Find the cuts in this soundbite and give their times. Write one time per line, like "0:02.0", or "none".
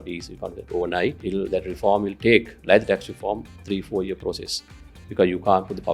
0:01.2